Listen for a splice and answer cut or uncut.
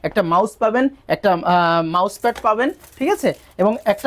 uncut